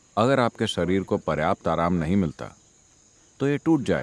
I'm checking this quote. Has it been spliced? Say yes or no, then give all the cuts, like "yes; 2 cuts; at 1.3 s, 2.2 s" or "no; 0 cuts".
no; 0 cuts